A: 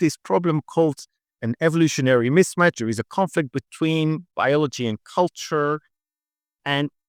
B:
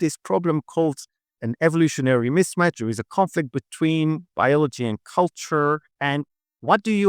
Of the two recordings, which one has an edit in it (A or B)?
B